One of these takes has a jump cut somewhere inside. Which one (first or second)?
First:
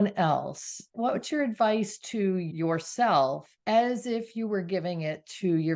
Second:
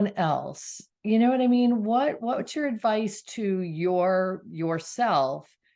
first